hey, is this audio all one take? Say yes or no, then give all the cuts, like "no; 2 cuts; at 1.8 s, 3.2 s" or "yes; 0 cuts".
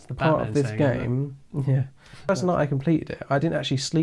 no; 1 cut; at 2.3 s